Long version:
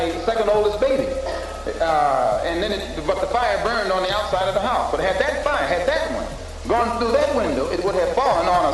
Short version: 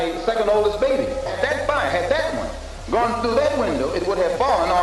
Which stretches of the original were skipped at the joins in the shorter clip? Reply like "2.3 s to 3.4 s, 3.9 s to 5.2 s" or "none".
1.4 s to 5.1 s